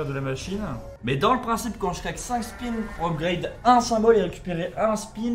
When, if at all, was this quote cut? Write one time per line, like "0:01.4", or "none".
none